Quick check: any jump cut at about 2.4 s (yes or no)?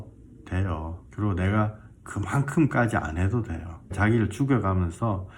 no